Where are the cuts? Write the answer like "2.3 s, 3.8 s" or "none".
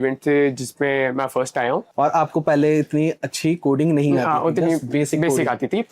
1.9 s

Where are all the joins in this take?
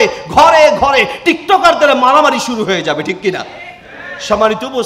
none

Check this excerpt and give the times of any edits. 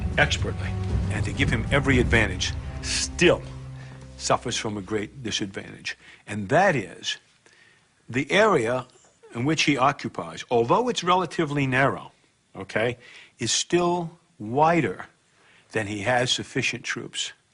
5.6 s

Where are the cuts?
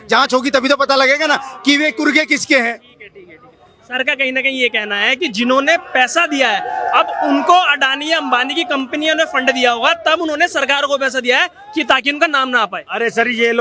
none

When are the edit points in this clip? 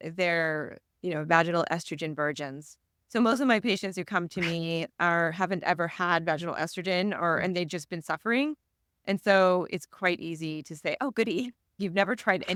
none

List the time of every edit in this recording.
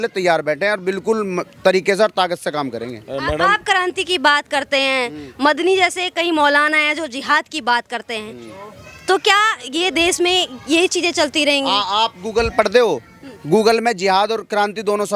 none

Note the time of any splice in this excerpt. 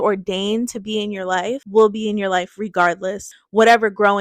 1.6 s, 3.3 s

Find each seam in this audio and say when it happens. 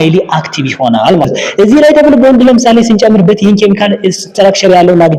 1.2 s

